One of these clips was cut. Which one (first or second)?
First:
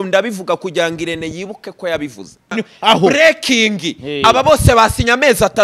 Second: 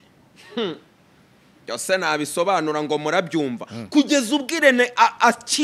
first